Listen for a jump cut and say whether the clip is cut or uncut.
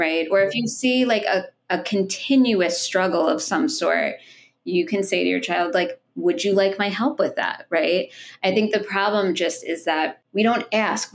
cut